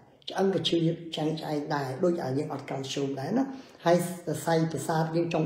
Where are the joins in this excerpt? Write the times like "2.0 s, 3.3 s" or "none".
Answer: none